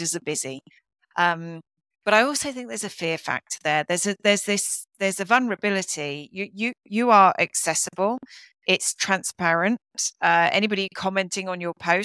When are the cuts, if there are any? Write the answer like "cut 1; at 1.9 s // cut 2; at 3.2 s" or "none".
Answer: none

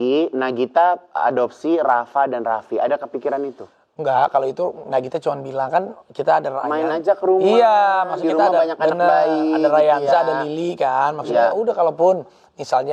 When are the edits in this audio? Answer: none

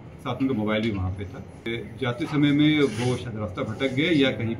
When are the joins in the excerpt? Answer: cut 1; at 1.7 s

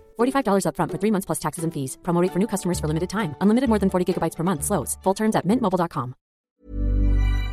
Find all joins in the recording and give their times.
cut 1; at 6.4 s

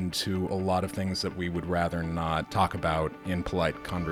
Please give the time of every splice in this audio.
cut 1; at 2.5 s // cut 2; at 3.2 s

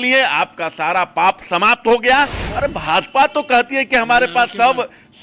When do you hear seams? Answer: cut 1; at 2.4 s

